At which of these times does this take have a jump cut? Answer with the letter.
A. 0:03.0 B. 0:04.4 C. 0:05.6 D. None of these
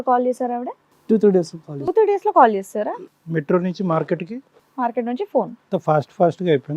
C